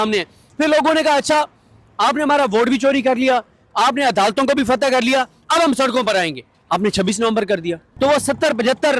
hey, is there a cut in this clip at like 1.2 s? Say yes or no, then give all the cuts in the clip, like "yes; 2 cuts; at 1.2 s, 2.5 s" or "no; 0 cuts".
no; 1 cut; at 7.9 s